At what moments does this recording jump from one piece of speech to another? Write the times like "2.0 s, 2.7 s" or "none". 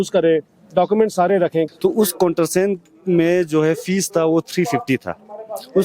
1.7 s